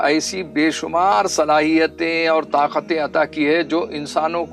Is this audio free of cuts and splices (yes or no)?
yes